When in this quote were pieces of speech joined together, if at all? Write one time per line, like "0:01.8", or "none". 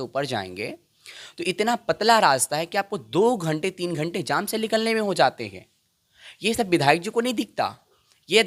none